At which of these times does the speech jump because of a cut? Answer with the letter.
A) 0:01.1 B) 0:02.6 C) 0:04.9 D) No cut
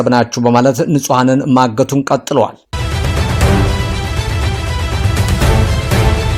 B